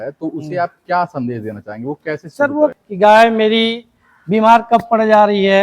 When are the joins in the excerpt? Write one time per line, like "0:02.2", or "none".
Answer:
0:02.7